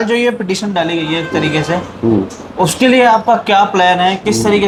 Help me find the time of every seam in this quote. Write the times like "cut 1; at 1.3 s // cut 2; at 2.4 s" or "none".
none